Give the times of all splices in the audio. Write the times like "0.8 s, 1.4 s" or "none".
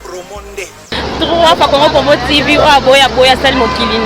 none